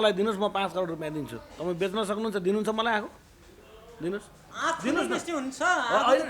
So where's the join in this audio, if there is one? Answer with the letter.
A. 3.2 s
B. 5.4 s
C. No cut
C